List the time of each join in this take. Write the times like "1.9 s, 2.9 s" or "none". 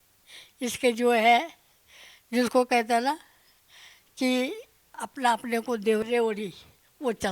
5.1 s, 6.0 s